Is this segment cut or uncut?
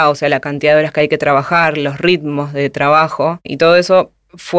cut